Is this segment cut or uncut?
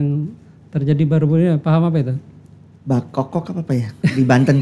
uncut